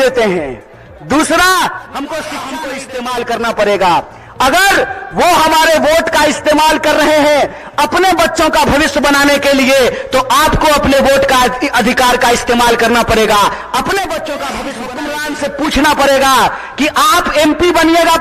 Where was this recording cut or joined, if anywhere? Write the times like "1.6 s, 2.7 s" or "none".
2.7 s, 15.1 s